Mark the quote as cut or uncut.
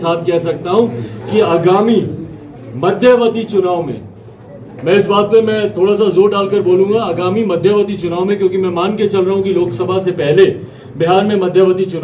uncut